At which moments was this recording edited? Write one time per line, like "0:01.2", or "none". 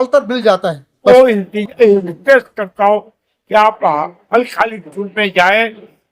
0:01.1